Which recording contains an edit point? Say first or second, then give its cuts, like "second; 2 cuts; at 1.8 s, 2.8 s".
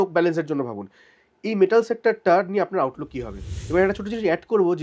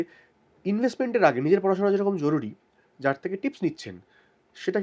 first; 1 cut; at 3.5 s